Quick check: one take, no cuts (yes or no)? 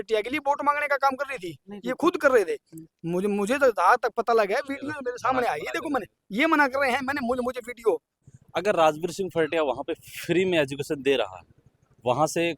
no